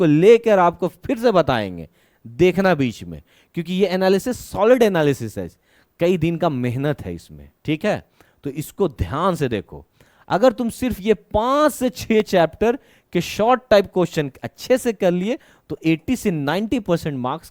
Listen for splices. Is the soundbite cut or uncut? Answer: uncut